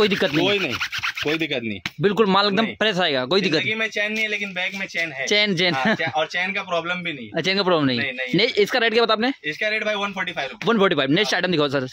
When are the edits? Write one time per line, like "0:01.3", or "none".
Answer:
none